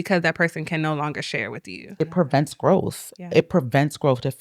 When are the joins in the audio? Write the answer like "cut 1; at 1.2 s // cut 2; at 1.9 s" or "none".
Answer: cut 1; at 2.0 s